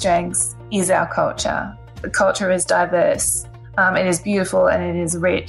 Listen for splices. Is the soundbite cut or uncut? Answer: cut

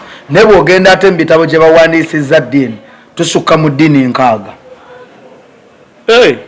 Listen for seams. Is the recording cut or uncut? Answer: uncut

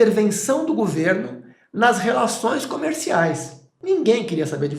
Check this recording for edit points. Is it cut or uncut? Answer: cut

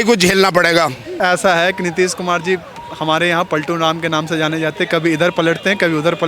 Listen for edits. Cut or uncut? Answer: cut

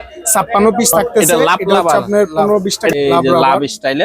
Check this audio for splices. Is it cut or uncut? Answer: cut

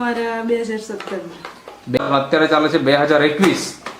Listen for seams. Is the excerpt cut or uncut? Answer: cut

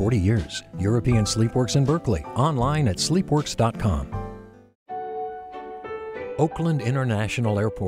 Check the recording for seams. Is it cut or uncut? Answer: cut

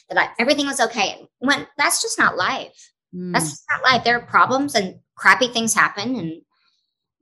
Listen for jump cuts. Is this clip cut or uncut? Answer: uncut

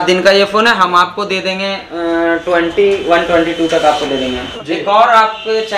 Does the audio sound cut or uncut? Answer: cut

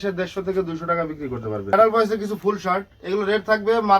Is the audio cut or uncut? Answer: cut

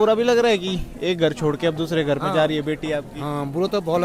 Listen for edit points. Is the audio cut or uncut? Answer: uncut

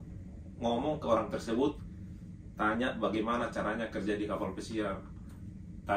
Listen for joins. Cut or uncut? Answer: uncut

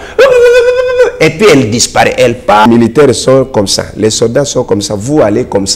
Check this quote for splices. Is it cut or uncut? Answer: cut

